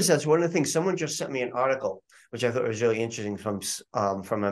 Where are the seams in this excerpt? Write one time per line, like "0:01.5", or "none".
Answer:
none